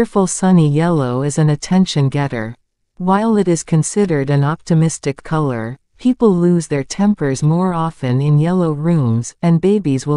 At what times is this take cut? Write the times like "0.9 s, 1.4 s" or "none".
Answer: none